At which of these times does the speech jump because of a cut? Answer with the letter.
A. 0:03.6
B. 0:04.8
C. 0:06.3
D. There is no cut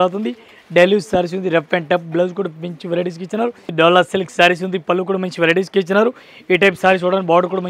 A